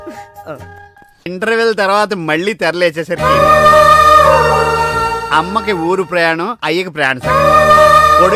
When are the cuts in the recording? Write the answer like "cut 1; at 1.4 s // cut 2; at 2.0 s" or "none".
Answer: cut 1; at 1.3 s